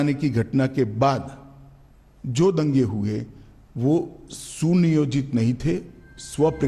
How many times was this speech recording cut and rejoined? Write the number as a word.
zero